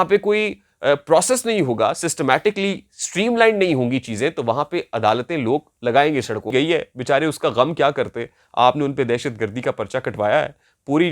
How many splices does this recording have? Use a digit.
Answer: 1